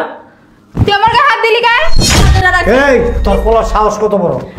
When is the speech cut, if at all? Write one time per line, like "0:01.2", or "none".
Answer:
0:02.2